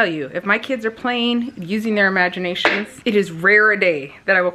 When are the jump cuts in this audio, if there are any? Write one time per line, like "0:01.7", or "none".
0:02.9